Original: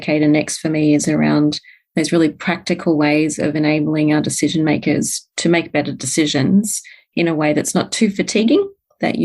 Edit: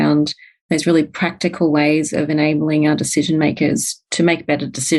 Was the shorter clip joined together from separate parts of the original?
no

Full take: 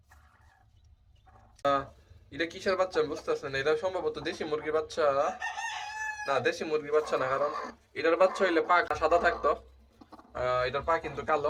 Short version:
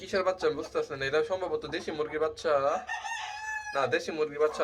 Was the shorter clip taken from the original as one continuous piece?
yes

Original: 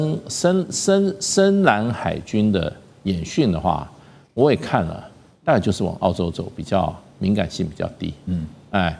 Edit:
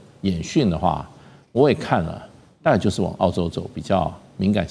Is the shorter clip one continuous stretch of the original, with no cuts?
yes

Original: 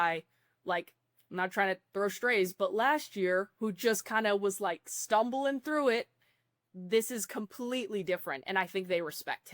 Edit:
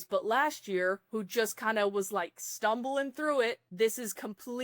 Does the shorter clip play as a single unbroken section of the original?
no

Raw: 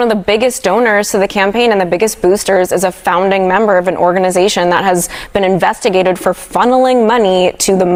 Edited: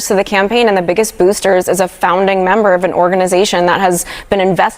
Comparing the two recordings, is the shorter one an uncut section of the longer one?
yes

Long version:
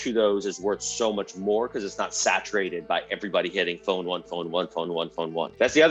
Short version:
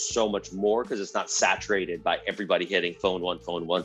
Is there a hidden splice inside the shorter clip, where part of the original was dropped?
no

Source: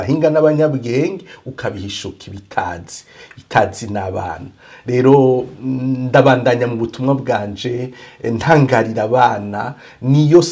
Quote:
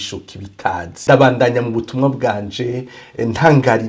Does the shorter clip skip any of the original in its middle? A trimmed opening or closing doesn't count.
yes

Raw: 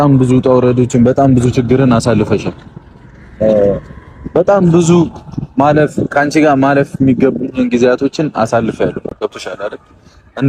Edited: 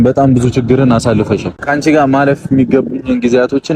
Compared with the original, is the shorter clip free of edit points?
no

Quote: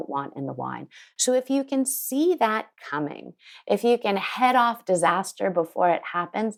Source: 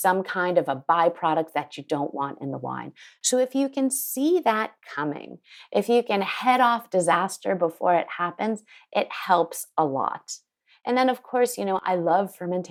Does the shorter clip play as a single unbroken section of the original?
yes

